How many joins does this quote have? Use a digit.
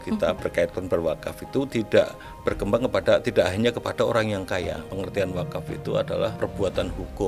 2